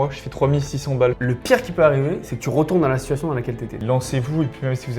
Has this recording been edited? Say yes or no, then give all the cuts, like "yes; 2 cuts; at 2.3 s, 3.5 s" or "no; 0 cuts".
yes; 2 cuts; at 1.2 s, 3.8 s